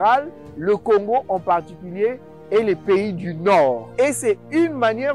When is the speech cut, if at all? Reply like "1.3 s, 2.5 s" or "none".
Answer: 3.9 s